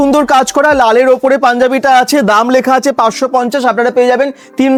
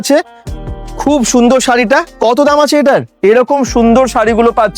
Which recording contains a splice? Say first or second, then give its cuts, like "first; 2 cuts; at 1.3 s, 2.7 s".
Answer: second; 1 cut; at 3.1 s